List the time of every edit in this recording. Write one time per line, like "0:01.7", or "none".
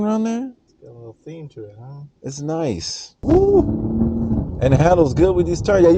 0:03.2